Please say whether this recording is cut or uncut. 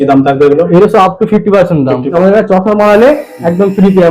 cut